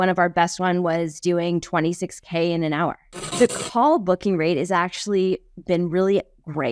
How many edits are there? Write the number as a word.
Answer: one